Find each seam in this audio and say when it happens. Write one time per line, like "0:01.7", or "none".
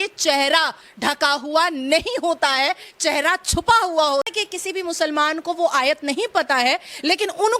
0:04.3

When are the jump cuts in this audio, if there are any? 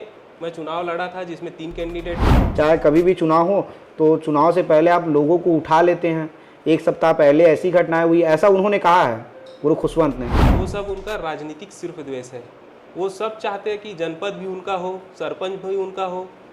0:02.4
0:10.4

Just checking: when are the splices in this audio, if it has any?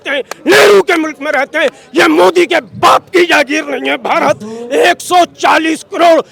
none

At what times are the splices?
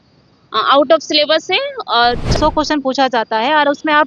0:02.3

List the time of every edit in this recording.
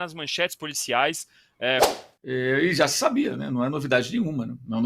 0:01.9

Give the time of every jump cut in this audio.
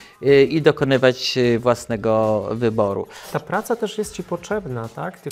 0:03.3

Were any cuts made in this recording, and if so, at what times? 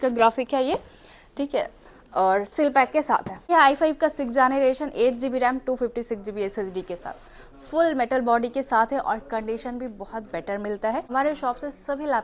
0:03.5
0:11.1

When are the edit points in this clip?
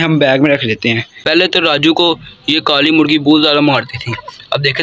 0:01.2

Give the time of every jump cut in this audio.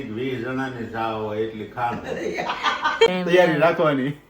0:03.1

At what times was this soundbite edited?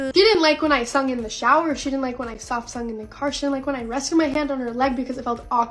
none

